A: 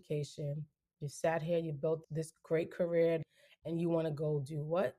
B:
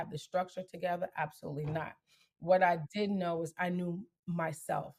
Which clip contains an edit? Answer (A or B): A